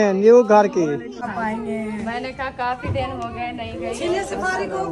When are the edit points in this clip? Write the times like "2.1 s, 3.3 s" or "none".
1.2 s